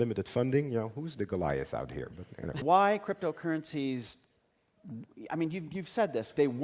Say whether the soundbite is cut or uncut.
cut